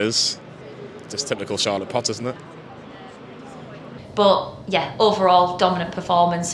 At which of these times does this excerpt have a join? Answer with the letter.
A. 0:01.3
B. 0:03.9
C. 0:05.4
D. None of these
B